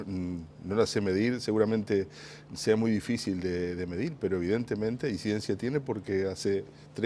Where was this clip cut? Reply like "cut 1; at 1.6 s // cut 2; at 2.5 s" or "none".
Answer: none